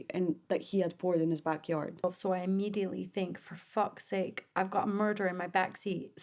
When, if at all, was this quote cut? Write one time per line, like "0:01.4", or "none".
0:02.0